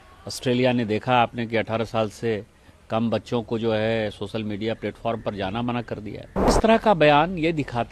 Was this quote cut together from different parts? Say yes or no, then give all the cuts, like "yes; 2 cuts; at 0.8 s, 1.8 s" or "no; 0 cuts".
yes; 1 cut; at 6.6 s